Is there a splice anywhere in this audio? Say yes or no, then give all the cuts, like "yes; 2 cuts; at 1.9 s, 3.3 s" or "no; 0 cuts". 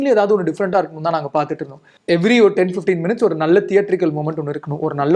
yes; 1 cut; at 1.9 s